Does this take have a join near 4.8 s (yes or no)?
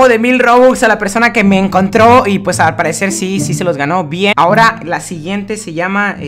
no